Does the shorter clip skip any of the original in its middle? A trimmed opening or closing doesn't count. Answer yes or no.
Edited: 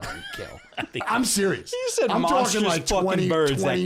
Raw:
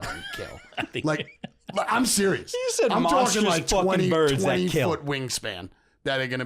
yes